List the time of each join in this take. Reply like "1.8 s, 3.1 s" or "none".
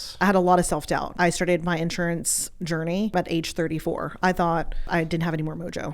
1.1 s, 3.1 s, 4.9 s